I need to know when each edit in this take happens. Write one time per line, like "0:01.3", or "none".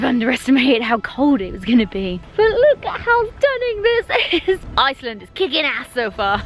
none